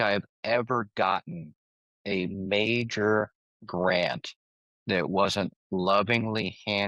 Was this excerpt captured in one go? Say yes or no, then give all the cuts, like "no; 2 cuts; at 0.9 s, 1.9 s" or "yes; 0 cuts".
yes; 0 cuts